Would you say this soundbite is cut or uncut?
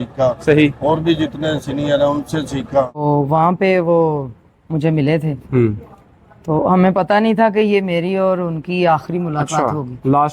cut